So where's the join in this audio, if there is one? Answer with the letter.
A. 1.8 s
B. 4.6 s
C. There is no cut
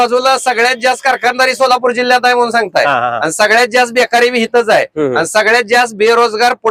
C